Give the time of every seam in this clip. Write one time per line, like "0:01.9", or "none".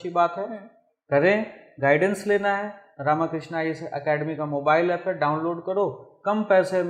none